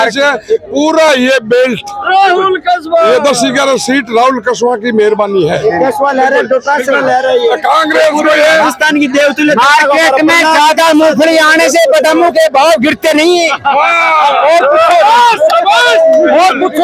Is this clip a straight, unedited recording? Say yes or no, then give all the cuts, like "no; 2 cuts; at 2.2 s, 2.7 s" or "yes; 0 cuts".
yes; 0 cuts